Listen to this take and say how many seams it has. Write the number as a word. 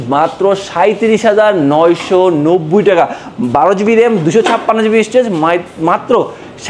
zero